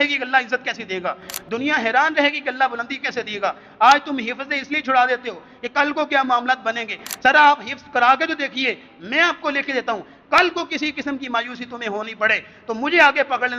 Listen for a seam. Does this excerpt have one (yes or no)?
no